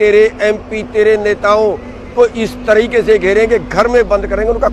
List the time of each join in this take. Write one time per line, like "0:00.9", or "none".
none

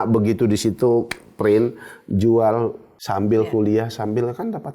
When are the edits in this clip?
0:02.9

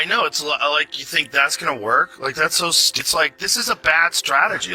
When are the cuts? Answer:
0:02.9

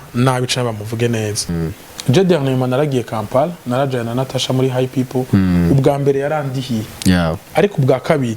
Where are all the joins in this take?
0:01.5

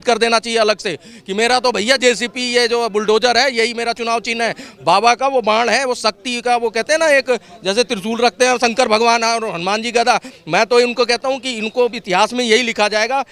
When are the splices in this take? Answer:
none

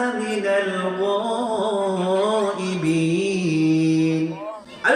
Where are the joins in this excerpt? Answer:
none

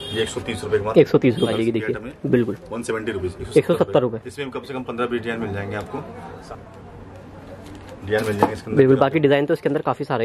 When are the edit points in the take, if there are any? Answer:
0:01.5
0:06.3

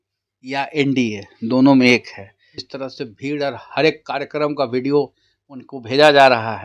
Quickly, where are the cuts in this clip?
0:02.7

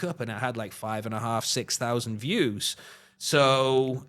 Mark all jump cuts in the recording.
none

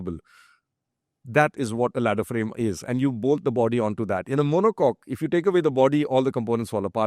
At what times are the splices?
none

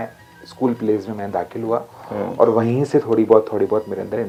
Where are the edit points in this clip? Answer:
none

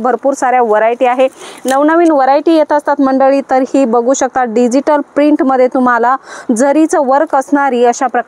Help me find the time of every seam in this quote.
none

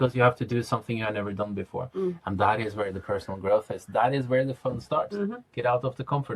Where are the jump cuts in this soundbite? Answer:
none

